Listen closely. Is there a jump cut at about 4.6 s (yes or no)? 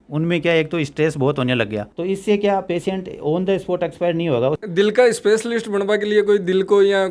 yes